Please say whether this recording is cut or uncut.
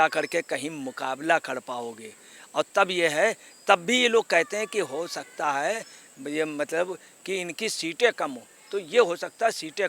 uncut